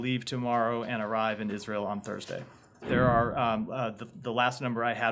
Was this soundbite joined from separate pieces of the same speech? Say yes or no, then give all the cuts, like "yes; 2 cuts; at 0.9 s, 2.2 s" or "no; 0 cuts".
yes; 1 cut; at 2.8 s